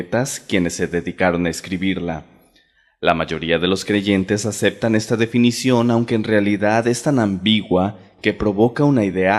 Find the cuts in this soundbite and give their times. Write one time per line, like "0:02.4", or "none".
none